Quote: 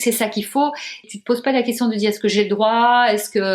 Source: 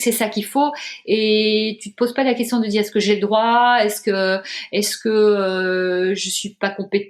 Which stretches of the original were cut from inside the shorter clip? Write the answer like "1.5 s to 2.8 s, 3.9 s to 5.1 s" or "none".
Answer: 1.0 s to 1.7 s